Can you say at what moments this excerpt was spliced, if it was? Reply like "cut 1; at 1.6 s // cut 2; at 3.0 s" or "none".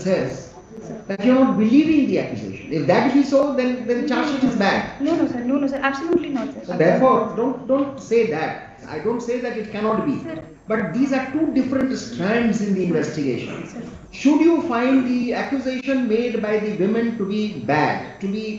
cut 1; at 8.8 s